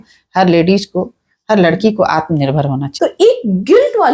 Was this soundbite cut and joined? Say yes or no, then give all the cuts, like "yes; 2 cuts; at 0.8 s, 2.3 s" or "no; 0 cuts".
yes; 1 cut; at 2.9 s